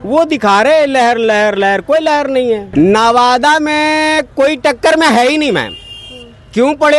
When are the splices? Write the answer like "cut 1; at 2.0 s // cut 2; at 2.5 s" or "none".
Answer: cut 1; at 2.6 s